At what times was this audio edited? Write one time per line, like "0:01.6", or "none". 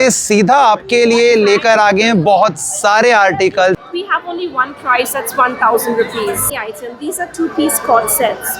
0:03.9
0:06.4